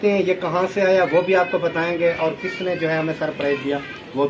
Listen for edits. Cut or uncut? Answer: uncut